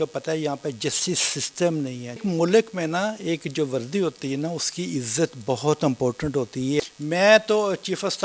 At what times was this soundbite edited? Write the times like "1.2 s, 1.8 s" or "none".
2.2 s, 6.8 s